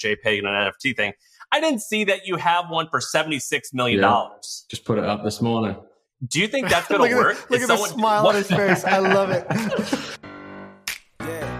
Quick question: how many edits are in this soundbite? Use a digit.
1